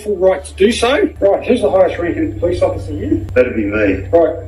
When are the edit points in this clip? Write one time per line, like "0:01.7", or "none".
0:01.1
0:03.3